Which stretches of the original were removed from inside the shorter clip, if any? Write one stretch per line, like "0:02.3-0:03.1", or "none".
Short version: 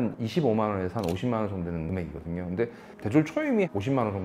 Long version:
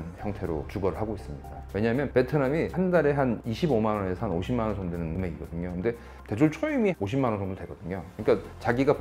none